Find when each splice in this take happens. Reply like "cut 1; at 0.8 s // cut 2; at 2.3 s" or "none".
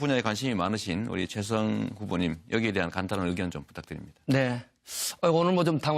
cut 1; at 1.1 s